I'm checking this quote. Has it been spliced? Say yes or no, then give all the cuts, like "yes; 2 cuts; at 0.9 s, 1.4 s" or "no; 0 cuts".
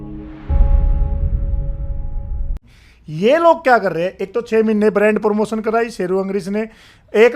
yes; 1 cut; at 2.3 s